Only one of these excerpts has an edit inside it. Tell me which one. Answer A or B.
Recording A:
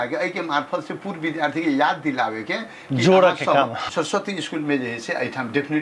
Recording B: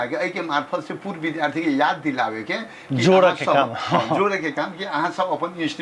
A